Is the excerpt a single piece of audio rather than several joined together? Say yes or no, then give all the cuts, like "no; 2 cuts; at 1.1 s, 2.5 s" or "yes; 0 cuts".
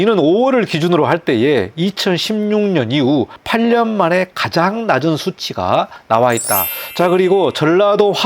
no; 3 cuts; at 3.4 s, 6.0 s, 6.8 s